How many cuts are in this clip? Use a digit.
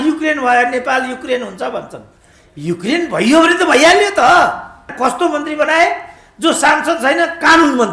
1